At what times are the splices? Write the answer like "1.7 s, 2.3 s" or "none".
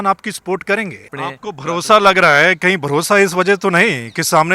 1.1 s

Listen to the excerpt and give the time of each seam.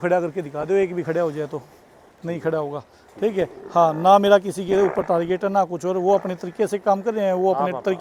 none

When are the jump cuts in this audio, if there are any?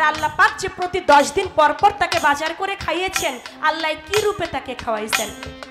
none

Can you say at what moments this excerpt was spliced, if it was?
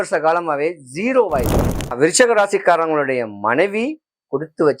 1.9 s

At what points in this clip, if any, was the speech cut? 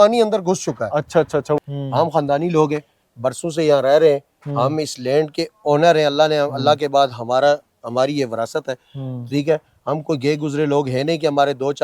1.6 s

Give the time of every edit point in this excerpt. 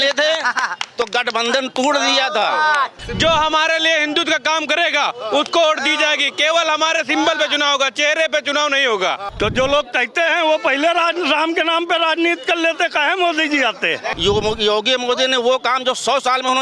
3.0 s, 9.3 s, 14.2 s

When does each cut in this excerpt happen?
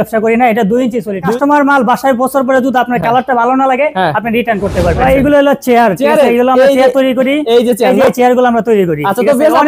1.3 s, 5.0 s

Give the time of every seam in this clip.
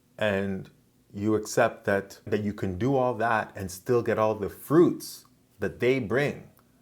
2.3 s

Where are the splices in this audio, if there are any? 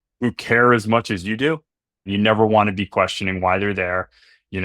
2.1 s

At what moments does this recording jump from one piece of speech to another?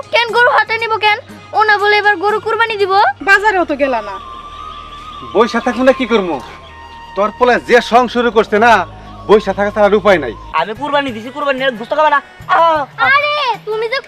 3.2 s, 10.4 s

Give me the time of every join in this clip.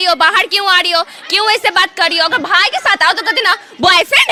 none

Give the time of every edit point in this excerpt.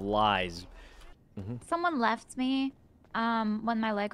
1.1 s

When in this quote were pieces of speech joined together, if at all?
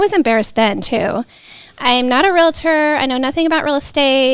none

